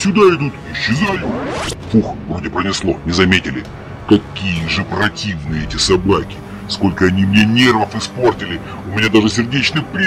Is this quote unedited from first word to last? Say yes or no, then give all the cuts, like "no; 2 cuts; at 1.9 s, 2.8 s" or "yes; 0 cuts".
yes; 0 cuts